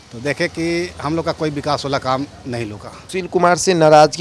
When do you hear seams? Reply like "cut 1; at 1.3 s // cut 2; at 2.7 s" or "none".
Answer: cut 1; at 2.9 s

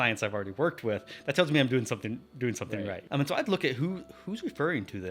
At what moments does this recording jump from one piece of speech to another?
cut 1; at 3.0 s

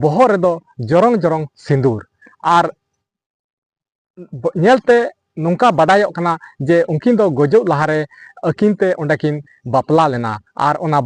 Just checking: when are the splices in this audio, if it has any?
none

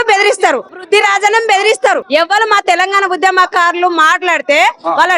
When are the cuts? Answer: cut 1; at 0.9 s // cut 2; at 2.0 s

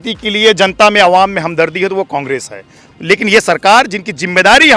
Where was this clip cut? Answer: cut 1; at 2.8 s

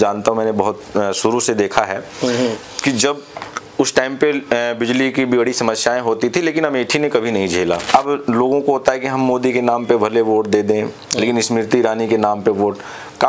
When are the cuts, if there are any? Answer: cut 1; at 7.8 s

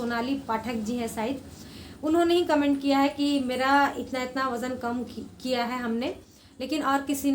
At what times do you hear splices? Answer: none

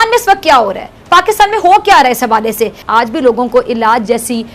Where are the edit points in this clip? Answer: cut 1; at 2.8 s

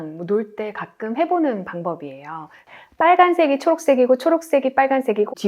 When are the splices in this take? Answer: cut 1; at 2.7 s

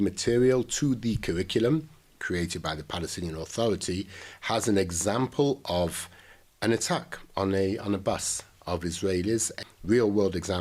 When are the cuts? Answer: cut 1; at 9.6 s

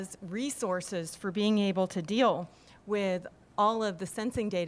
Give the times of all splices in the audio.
none

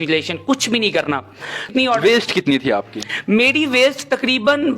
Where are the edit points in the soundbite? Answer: cut 1; at 1.7 s

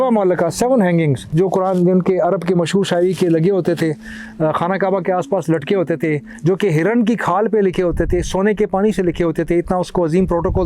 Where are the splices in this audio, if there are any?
cut 1; at 1.3 s

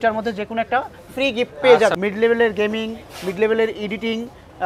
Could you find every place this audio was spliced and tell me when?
cut 1; at 1.9 s

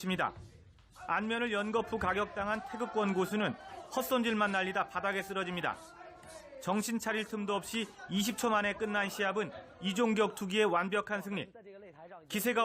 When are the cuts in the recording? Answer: cut 1; at 8.6 s

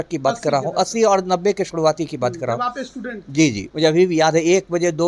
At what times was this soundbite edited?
cut 1; at 3.7 s

